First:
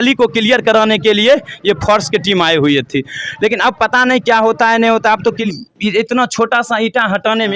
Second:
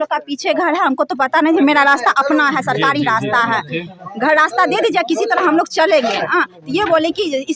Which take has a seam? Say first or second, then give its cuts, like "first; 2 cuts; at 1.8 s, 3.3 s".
first; 1 cut; at 5.4 s